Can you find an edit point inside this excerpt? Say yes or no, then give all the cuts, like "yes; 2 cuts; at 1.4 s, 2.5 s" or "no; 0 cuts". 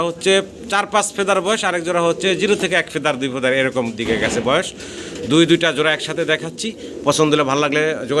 no; 0 cuts